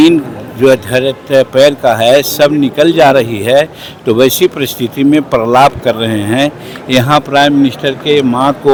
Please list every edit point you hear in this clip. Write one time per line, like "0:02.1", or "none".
none